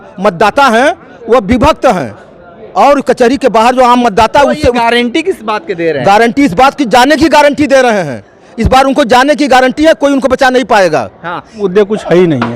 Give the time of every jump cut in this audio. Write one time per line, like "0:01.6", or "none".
0:11.6

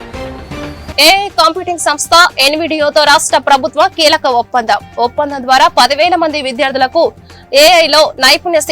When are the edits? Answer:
0:00.9

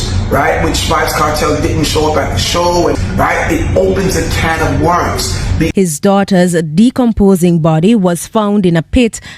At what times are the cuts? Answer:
0:02.9
0:05.7

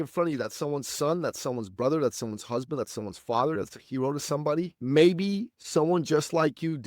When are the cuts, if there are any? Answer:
0:04.8

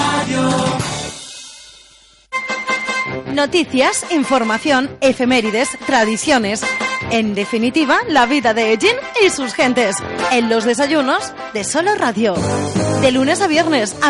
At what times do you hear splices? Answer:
0:02.3

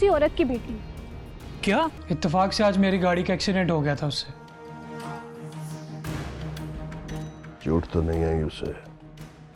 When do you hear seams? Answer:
0:02.0

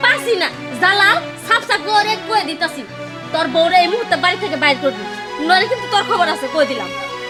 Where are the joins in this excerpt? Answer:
none

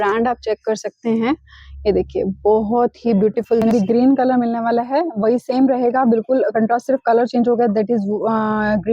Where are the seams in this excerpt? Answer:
0:03.6

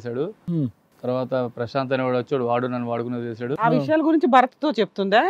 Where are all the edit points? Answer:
0:03.5

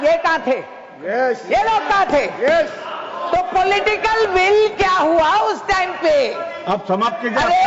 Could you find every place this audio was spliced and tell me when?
none

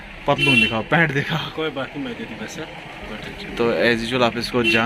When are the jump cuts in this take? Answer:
none

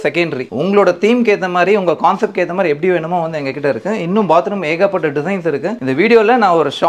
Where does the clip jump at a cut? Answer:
none

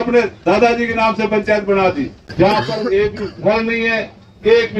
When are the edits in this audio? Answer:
0:02.2

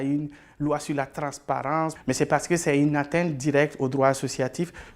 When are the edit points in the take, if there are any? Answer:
0:02.0

